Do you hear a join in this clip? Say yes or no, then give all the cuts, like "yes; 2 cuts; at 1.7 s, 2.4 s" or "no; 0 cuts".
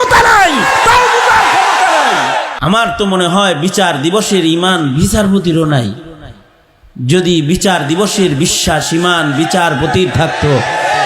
yes; 1 cut; at 2.5 s